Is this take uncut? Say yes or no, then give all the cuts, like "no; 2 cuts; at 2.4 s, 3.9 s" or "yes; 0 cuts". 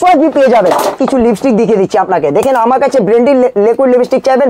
no; 1 cut; at 1.0 s